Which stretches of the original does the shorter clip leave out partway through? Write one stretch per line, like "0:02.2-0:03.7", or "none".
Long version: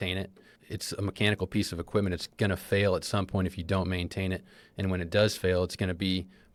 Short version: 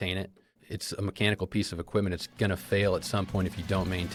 none